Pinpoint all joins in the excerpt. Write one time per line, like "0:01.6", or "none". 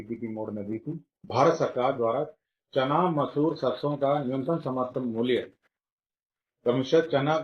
0:01.1

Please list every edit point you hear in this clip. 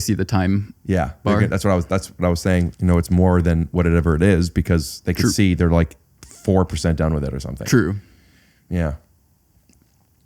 0:02.7

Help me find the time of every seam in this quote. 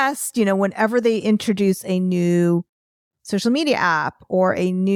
none

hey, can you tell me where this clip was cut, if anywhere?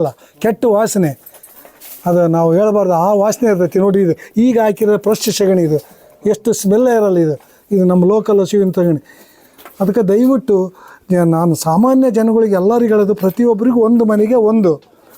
none

